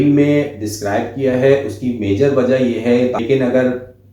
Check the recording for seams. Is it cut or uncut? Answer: cut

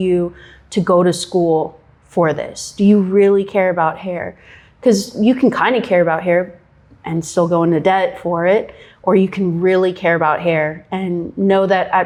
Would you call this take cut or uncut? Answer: uncut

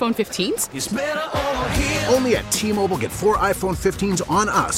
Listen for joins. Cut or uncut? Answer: uncut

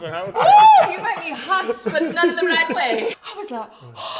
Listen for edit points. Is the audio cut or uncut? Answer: cut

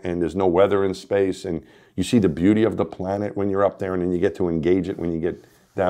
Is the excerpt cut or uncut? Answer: uncut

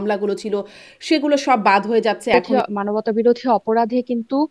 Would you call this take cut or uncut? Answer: cut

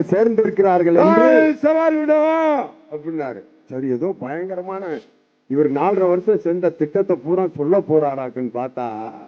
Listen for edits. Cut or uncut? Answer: cut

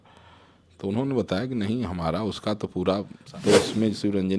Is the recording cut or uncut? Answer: cut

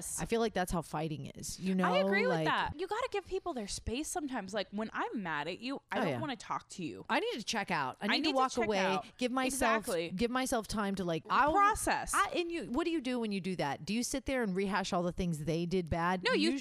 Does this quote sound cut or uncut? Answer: cut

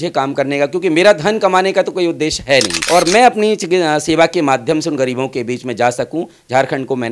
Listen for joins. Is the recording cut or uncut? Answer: uncut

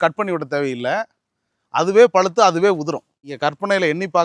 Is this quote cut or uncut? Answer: cut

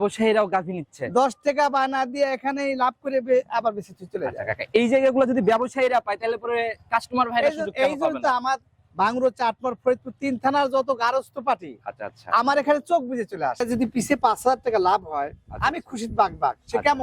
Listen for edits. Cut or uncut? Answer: cut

